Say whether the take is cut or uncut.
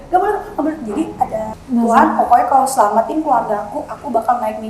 cut